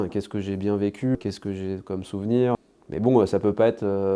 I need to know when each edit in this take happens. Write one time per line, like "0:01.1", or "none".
0:01.2
0:02.6